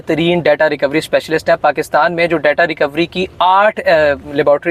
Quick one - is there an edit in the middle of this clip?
no; 0 cuts

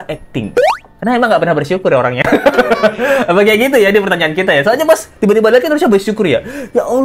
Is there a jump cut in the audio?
no; 0 cuts

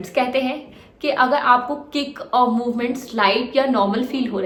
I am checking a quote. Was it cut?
no; 0 cuts

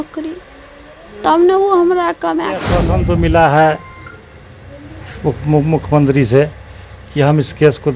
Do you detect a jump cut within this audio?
yes; 1 cut; at 2.8 s

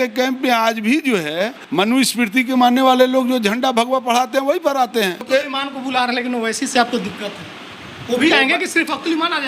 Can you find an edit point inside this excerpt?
yes; 2 cuts; at 1.6 s, 5.3 s

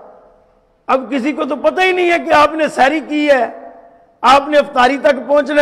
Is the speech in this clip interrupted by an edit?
no; 0 cuts

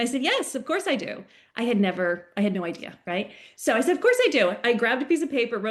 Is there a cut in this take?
no; 0 cuts

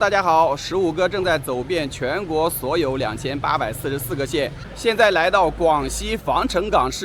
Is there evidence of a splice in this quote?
yes; 1 cut; at 4.7 s

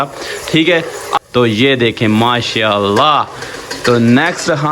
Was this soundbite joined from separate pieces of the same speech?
yes; 1 cut; at 1.1 s

